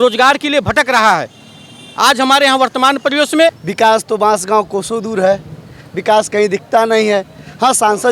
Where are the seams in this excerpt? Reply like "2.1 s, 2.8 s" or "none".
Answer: 3.6 s